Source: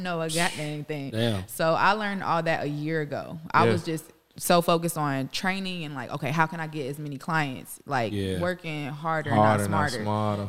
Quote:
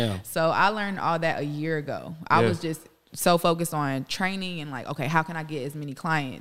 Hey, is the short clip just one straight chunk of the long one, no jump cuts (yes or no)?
yes